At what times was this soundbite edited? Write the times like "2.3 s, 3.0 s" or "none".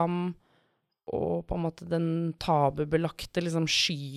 1.1 s